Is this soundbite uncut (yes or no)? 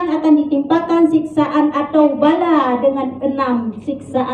yes